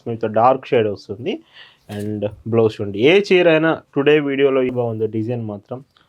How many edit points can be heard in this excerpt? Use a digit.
1